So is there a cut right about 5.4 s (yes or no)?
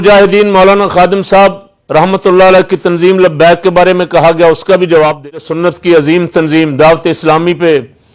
yes